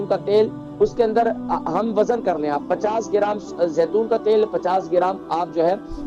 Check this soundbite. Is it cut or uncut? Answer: uncut